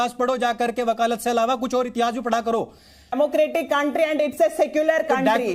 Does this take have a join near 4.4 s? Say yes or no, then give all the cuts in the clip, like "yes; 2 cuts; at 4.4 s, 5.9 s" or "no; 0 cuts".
no; 1 cut; at 3.2 s